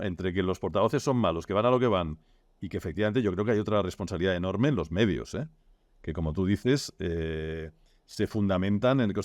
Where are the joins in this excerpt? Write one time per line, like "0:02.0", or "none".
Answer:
none

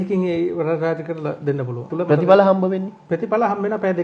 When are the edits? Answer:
0:01.9

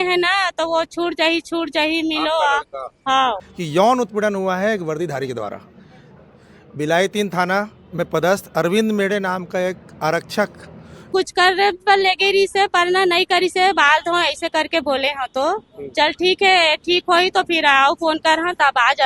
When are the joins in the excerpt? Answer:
0:03.5
0:11.1

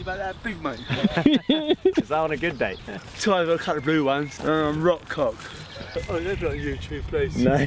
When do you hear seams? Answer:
0:02.9
0:04.4
0:06.0

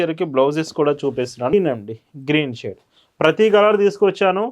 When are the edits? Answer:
0:01.5

